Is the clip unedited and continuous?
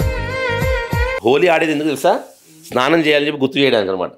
no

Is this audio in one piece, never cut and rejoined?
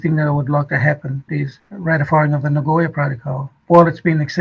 no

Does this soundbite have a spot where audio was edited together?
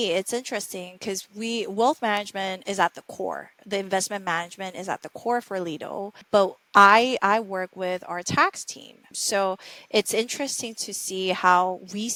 no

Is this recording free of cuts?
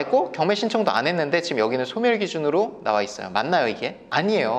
yes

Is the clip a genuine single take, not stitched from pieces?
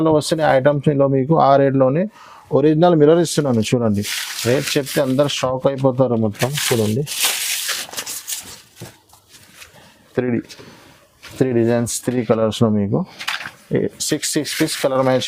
yes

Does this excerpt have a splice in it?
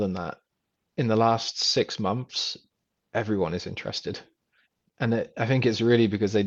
no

